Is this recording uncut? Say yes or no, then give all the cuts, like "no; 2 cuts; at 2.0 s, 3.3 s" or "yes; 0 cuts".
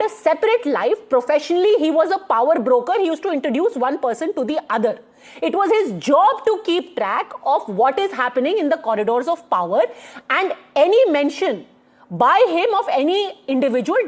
yes; 0 cuts